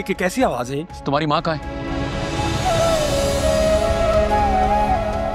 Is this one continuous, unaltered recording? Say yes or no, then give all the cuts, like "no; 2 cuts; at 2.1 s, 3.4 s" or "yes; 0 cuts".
no; 1 cut; at 1.7 s